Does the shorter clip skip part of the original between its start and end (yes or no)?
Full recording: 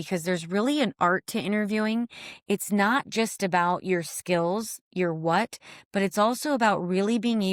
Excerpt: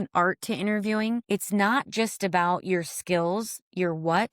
yes